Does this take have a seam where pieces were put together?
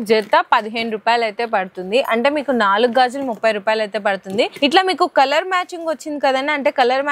no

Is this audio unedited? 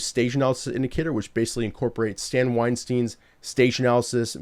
yes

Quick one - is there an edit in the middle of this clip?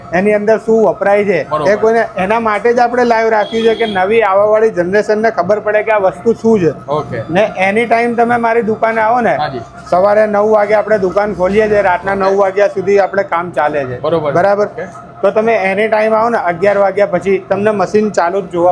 no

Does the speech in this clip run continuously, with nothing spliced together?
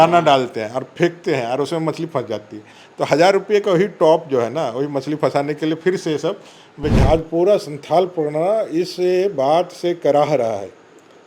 no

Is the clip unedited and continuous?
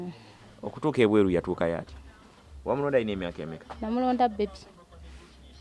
yes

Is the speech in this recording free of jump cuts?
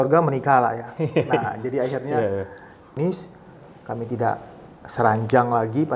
no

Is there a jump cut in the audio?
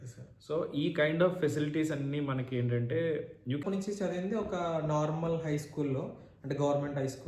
yes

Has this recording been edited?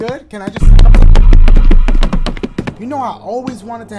yes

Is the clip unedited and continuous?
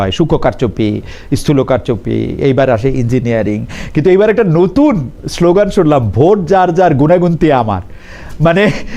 yes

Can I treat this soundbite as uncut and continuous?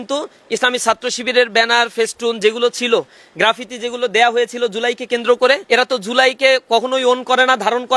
no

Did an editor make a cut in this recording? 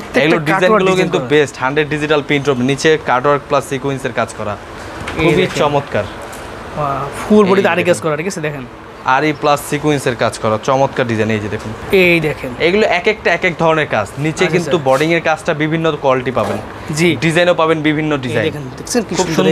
no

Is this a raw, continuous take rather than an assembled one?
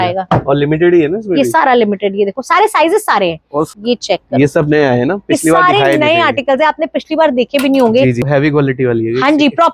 no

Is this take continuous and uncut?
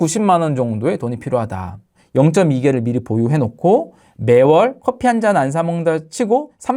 no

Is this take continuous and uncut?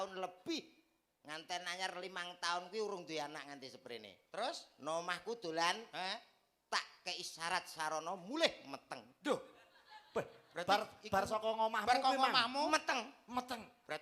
yes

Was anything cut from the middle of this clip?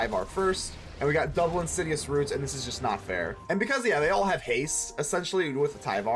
yes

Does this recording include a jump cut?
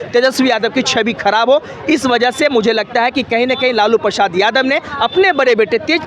no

